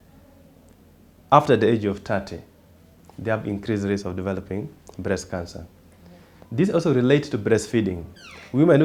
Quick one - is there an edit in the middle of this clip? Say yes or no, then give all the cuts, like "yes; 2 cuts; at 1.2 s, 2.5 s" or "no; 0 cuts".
no; 0 cuts